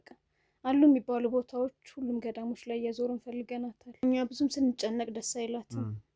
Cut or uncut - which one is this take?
cut